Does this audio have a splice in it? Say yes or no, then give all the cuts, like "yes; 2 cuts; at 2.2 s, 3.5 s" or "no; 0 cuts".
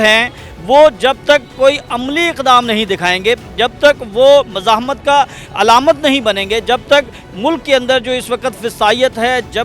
no; 0 cuts